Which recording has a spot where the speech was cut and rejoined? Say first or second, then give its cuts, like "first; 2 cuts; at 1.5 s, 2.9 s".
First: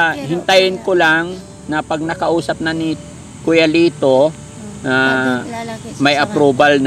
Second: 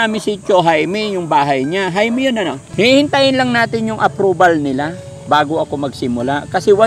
second; 1 cut; at 2.6 s